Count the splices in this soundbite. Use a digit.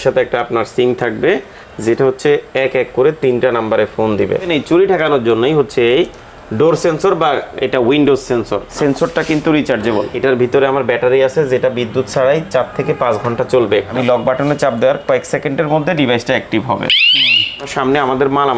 5